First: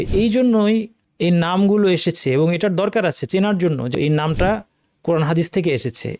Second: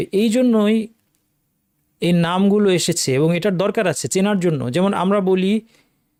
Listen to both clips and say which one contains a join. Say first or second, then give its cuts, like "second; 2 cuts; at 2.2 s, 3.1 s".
first; 2 cuts; at 1.0 s, 3.9 s